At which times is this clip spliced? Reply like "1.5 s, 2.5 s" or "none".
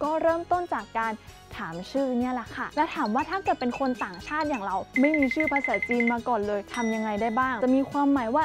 2.7 s, 7.6 s